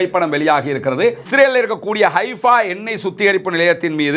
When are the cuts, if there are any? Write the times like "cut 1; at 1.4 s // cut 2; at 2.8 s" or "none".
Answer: cut 1; at 1.2 s